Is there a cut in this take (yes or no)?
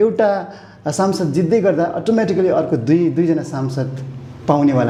no